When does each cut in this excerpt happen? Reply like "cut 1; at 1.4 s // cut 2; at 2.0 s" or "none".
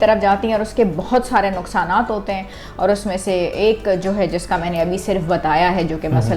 none